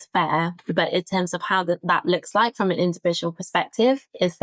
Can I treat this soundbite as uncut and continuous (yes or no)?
yes